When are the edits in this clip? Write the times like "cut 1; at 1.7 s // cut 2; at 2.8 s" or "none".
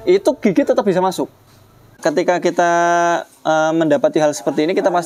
cut 1; at 2.0 s